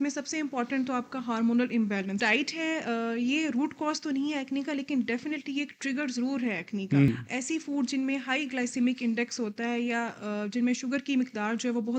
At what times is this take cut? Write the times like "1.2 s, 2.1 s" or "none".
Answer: 2.2 s, 7.1 s